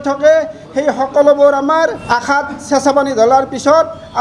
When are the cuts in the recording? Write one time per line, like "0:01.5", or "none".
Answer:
0:02.0